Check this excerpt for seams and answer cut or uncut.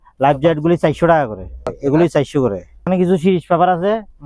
cut